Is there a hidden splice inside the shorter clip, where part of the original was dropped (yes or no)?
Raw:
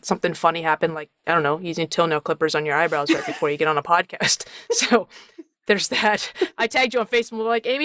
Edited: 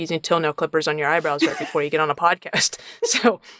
no